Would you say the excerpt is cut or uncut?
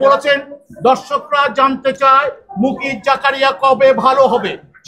uncut